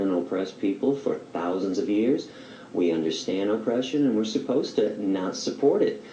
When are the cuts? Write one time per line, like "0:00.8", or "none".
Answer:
0:02.5